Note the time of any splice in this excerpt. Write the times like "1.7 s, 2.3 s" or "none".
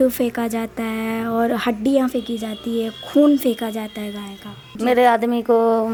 none